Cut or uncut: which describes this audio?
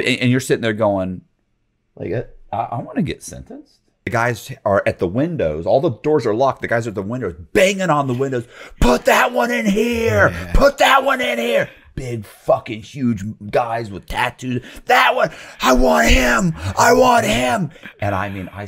cut